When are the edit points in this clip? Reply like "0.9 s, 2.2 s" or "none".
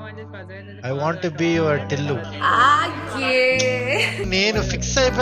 4.3 s